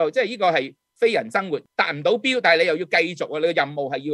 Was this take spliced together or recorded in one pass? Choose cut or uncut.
cut